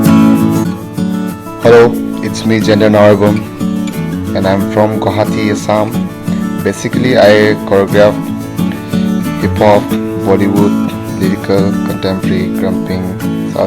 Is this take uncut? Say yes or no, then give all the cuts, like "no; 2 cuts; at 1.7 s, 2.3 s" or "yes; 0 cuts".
no; 1 cut; at 1.1 s